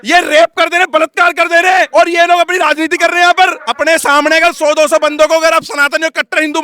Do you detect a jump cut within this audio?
yes; 1 cut; at 3.7 s

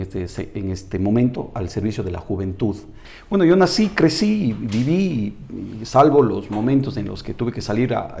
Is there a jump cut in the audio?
yes; 1 cut; at 3.0 s

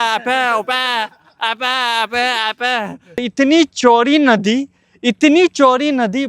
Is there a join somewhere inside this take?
yes; 1 cut; at 3.2 s

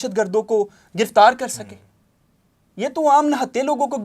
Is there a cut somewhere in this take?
no; 0 cuts

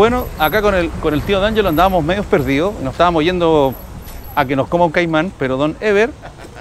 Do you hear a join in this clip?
no; 0 cuts

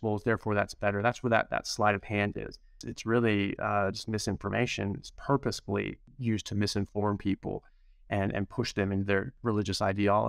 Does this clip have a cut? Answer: yes; 3 cuts; at 2.9 s, 6.0 s, 9.3 s

